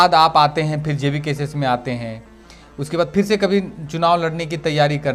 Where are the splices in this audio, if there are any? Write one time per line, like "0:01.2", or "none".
none